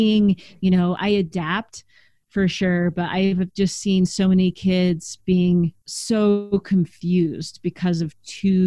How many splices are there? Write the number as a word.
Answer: two